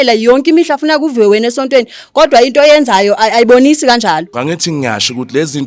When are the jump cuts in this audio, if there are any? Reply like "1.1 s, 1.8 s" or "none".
4.3 s